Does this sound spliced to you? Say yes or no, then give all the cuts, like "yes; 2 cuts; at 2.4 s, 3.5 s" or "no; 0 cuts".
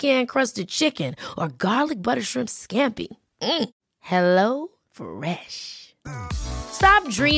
no; 0 cuts